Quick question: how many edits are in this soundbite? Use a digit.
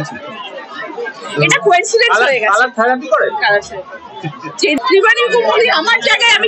1